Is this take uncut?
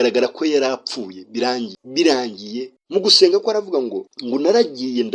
no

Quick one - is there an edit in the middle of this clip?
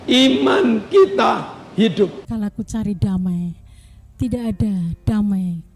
yes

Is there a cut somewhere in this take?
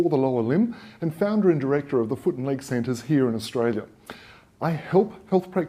yes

